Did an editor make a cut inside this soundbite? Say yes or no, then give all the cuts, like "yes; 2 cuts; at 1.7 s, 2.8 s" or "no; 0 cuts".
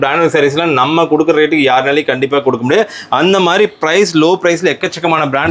no; 0 cuts